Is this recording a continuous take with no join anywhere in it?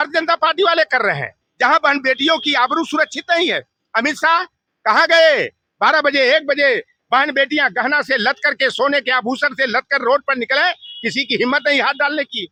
yes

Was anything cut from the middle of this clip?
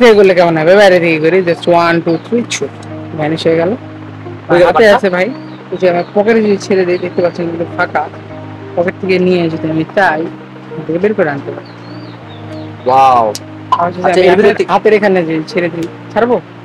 no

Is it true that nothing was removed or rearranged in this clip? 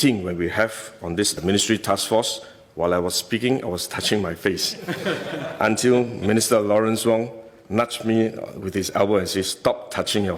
yes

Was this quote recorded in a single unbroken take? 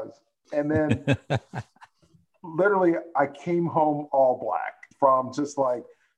no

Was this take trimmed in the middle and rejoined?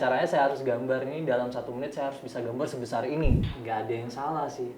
yes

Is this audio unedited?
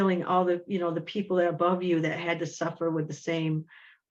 yes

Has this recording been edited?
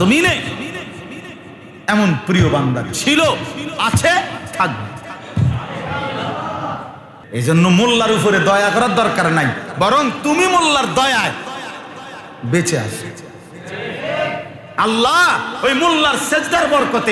yes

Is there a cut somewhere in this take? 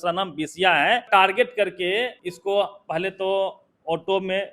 yes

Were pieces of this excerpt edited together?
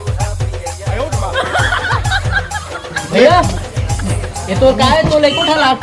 no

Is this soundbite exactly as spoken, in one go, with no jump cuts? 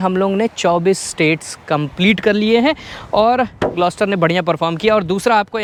yes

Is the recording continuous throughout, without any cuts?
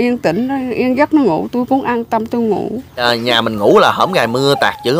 no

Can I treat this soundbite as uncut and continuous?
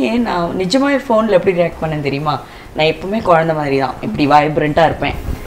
yes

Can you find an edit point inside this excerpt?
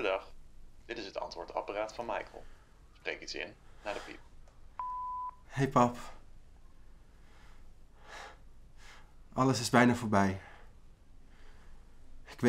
yes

